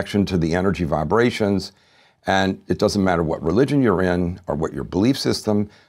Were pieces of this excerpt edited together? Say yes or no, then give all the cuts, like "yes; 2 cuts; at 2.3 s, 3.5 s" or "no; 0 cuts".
no; 0 cuts